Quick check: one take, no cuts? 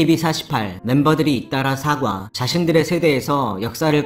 yes; 0 cuts

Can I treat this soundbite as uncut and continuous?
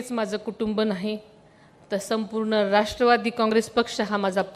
yes; 0 cuts

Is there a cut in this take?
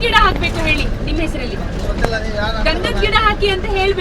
no; 0 cuts

